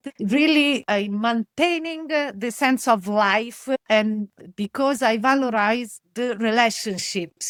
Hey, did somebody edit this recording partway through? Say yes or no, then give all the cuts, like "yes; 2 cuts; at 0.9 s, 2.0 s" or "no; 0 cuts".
no; 0 cuts